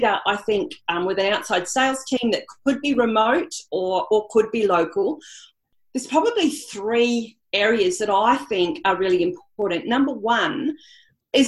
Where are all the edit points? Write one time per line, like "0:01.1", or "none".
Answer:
none